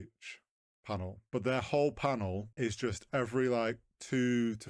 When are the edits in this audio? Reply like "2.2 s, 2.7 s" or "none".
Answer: 1.2 s, 2.5 s